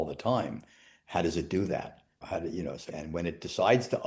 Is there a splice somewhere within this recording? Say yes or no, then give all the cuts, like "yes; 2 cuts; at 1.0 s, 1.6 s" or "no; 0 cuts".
yes; 2 cuts; at 2.2 s, 2.9 s